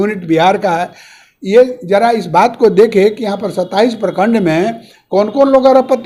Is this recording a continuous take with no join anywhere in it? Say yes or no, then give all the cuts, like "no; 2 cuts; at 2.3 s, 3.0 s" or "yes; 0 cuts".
yes; 0 cuts